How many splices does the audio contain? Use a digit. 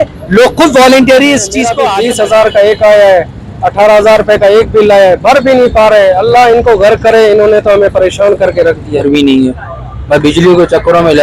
2